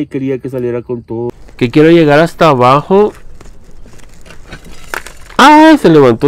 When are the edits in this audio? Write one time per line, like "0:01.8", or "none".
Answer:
0:01.3